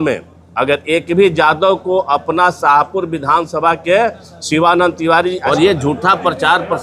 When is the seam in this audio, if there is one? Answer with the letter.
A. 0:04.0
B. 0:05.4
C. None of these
B